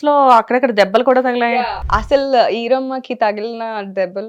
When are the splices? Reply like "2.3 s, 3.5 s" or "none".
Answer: 1.5 s